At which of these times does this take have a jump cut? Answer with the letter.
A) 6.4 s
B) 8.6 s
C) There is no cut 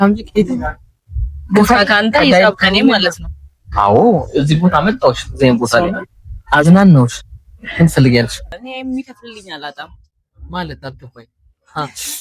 B